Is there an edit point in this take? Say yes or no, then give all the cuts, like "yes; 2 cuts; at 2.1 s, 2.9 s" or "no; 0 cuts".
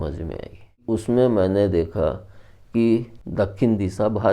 yes; 2 cuts; at 0.8 s, 3.2 s